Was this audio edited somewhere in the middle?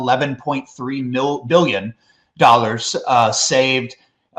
no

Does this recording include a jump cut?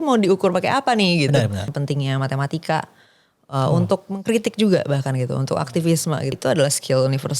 yes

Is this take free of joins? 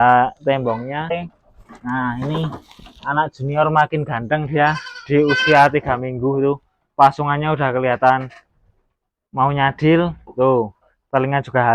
no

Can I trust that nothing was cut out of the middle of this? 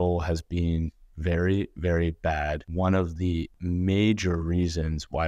no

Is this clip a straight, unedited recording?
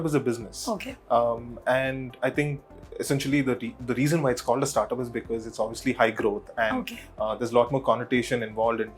yes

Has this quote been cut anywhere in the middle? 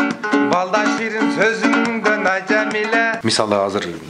yes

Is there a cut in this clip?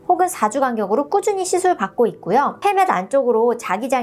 yes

